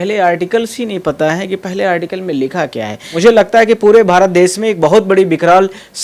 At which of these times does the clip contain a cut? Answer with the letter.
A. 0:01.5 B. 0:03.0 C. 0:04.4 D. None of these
B